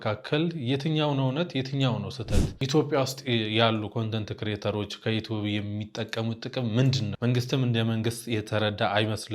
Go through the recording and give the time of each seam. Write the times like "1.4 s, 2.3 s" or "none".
2.6 s, 7.1 s